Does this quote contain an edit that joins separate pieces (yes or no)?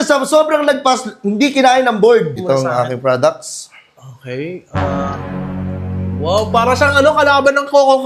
yes